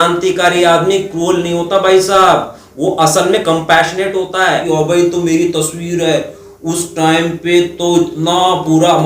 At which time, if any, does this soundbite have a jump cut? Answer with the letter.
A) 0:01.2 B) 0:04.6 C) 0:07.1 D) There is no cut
B